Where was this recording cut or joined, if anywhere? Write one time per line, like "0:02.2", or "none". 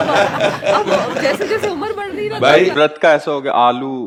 none